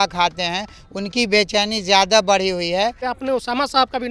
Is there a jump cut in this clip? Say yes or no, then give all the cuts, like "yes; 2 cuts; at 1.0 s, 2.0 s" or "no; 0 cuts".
yes; 1 cut; at 3.0 s